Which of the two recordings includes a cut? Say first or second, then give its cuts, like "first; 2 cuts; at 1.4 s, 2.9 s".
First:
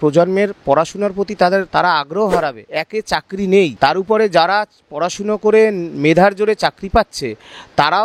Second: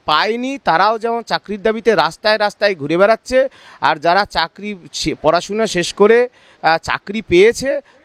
first; 2 cuts; at 2.8 s, 3.7 s